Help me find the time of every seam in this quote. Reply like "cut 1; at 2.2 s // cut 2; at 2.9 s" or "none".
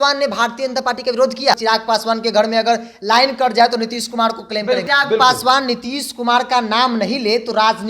cut 1; at 1.5 s // cut 2; at 4.8 s